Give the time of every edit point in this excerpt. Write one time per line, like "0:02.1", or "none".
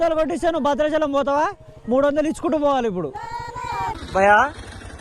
0:04.0